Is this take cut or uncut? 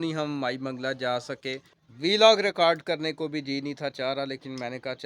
cut